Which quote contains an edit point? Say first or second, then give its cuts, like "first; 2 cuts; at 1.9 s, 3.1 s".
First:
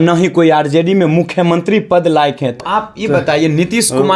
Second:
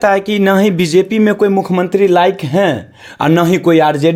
first; 1 cut; at 2.5 s